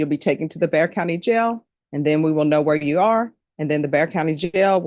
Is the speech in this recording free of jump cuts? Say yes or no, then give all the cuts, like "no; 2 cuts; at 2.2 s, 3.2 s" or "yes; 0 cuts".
yes; 0 cuts